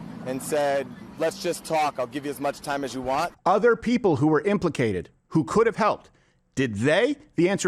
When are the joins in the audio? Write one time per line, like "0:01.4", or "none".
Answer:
0:03.3